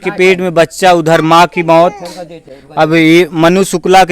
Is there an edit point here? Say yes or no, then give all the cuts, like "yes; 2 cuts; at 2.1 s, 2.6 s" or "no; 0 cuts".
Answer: no; 0 cuts